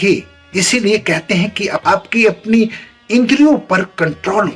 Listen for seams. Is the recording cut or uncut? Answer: uncut